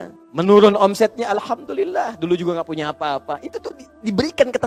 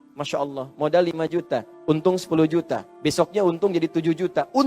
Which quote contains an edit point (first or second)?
second